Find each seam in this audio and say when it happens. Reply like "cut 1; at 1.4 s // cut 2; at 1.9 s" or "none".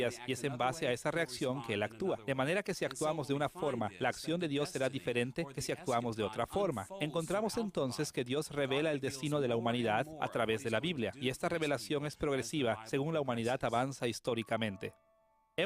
cut 1; at 6.0 s